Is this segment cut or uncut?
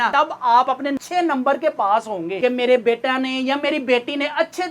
cut